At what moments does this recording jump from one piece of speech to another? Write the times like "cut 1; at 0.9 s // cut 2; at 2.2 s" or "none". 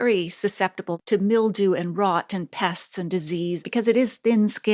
cut 1; at 0.9 s // cut 2; at 3.6 s